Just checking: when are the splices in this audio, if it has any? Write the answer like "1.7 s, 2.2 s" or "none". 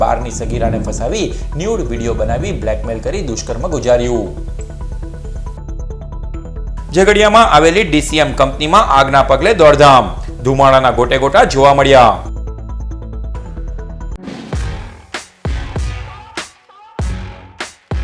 14.1 s